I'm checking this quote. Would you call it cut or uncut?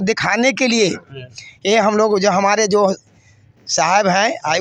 uncut